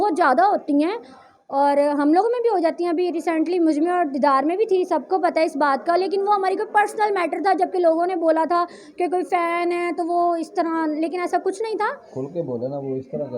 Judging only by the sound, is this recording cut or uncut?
uncut